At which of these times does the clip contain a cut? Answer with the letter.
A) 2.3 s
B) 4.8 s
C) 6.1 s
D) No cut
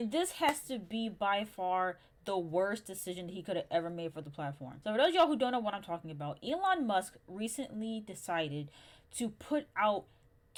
D